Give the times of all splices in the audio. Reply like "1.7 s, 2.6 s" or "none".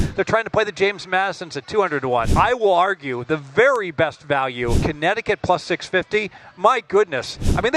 2.3 s, 4.8 s